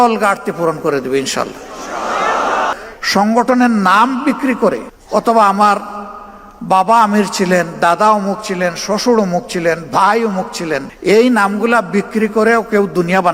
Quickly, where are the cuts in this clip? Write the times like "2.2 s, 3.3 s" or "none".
2.7 s, 4.9 s, 10.9 s